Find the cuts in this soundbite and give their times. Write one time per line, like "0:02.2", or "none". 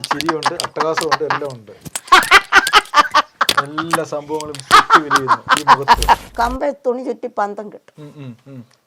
0:06.3